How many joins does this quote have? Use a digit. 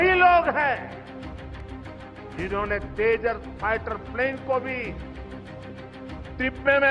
2